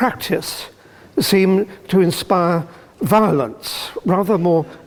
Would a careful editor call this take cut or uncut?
uncut